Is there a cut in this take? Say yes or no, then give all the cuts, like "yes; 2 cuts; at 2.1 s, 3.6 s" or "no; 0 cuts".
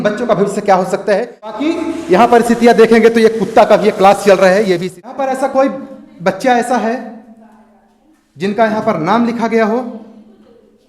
yes; 2 cuts; at 1.5 s, 5.1 s